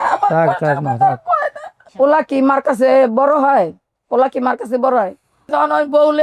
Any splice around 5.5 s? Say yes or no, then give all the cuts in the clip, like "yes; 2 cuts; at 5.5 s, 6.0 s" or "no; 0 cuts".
yes; 2 cuts; at 1.8 s, 5.5 s